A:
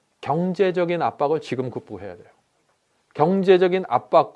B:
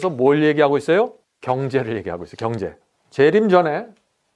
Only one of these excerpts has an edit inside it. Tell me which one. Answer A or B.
B